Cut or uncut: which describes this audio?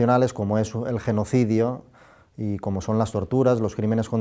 cut